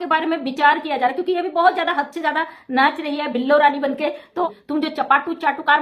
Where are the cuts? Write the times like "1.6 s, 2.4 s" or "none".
4.5 s

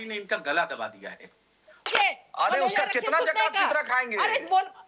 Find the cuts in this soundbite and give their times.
1.8 s

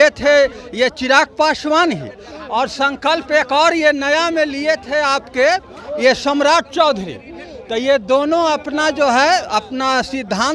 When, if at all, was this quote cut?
none

